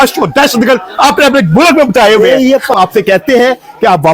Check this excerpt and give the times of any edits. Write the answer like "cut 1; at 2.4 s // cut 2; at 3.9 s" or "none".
cut 1; at 2.7 s